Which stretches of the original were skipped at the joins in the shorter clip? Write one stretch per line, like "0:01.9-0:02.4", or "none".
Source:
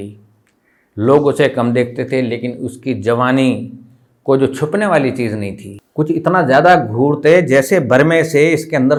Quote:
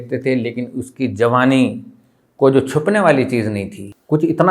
none